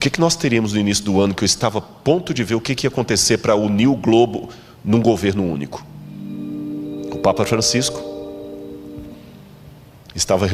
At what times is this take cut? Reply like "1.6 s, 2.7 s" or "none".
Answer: none